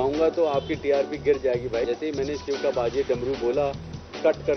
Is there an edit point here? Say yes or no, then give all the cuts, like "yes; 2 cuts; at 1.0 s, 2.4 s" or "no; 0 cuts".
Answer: no; 0 cuts